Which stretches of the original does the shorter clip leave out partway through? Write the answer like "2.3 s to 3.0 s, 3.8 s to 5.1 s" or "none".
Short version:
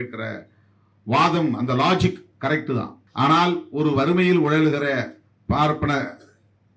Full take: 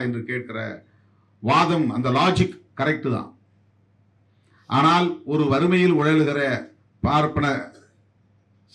3.4 s to 4.5 s